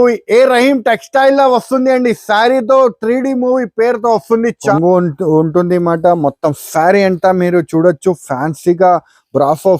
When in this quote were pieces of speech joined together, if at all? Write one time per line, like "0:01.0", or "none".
0:04.6